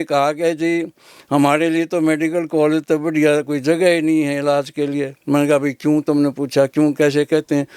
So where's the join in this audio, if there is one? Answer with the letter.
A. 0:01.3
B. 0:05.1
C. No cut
C